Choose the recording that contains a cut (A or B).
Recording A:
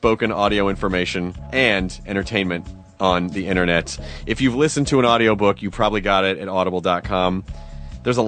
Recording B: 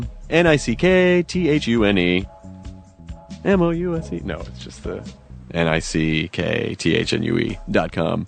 A